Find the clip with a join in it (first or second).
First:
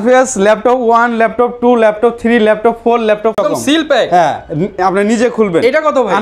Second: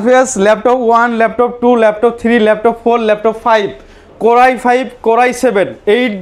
first